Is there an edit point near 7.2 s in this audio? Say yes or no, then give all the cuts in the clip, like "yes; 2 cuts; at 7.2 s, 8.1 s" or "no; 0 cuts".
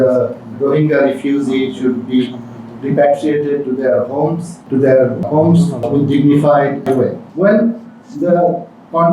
yes; 1 cut; at 7.2 s